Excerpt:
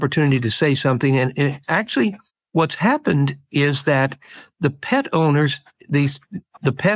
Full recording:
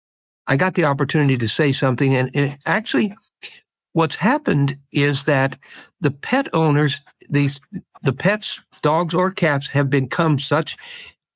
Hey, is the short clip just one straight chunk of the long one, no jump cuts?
no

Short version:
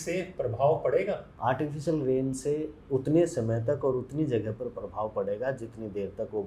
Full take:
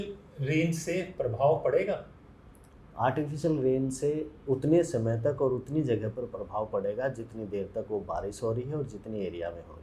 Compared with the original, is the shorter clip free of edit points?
no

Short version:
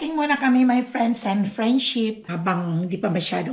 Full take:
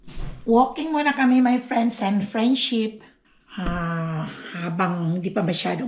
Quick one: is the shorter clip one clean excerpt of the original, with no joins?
no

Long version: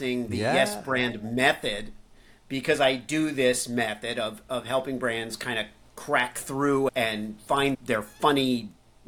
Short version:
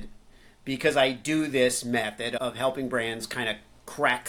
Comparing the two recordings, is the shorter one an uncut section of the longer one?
no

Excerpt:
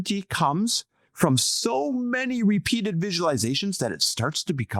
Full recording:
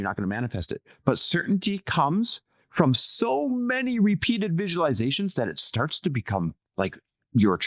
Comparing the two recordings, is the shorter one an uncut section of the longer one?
yes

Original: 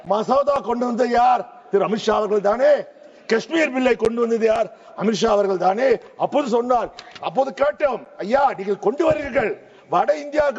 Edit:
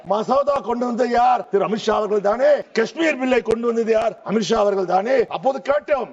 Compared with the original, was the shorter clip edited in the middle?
yes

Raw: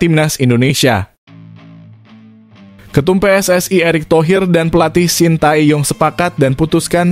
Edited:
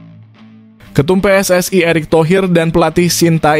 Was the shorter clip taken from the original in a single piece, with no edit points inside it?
no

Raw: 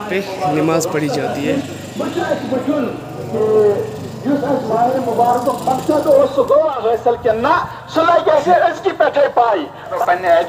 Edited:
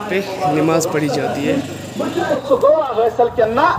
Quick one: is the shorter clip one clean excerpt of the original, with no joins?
no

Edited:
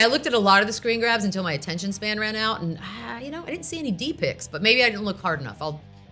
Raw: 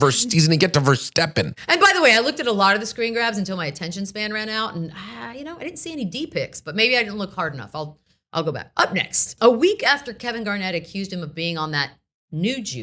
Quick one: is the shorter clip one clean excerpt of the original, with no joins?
yes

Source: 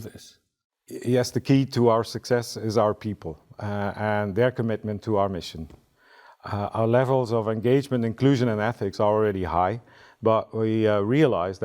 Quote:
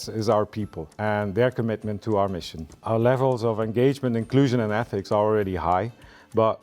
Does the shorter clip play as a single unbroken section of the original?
no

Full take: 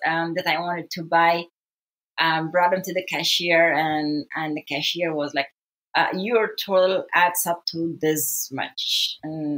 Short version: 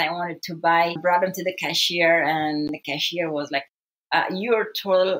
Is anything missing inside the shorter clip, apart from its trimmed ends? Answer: yes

